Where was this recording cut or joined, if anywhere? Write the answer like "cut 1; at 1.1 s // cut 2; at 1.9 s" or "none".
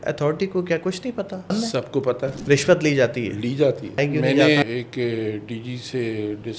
cut 1; at 1.5 s // cut 2; at 2.4 s // cut 3; at 4.0 s // cut 4; at 4.6 s